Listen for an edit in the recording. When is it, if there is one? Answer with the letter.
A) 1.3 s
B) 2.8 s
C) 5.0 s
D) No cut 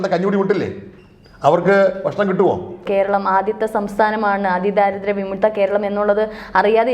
B